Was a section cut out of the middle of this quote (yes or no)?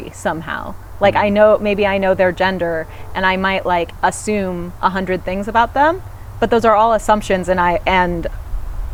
no